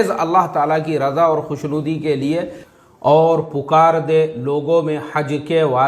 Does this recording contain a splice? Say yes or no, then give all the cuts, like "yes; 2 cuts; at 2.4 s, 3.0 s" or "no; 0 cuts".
yes; 1 cut; at 2.7 s